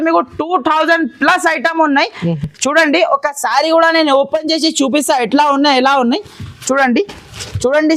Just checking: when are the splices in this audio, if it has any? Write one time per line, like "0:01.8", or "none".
none